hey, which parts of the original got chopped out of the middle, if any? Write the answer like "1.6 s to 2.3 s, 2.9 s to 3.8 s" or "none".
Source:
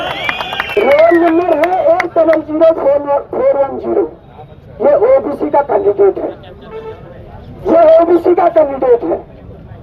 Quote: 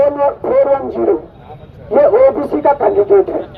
none